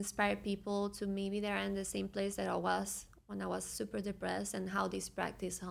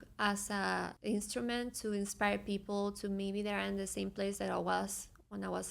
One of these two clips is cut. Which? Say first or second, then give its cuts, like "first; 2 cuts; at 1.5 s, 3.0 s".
second; 1 cut; at 0.9 s